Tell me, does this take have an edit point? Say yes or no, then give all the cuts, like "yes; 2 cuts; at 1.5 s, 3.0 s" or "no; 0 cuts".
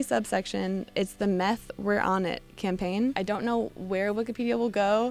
yes; 2 cuts; at 0.9 s, 3.6 s